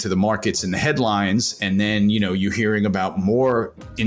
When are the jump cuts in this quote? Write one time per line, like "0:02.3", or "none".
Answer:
none